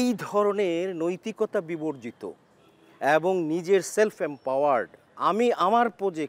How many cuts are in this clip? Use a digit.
0